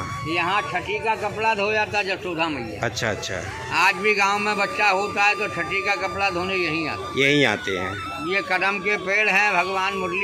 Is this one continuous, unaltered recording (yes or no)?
yes